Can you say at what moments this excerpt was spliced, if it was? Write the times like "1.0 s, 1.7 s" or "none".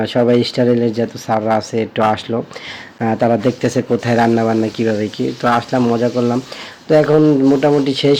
none